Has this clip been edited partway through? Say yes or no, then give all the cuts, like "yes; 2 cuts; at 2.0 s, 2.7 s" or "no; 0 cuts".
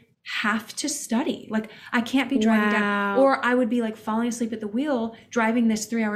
no; 0 cuts